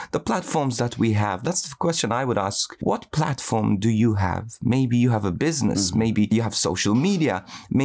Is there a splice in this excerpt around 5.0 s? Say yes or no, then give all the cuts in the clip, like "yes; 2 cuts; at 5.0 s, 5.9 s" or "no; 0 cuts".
no; 3 cuts; at 1.4 s, 2.7 s, 6.3 s